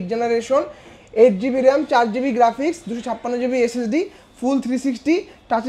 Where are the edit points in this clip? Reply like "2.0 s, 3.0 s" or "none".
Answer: none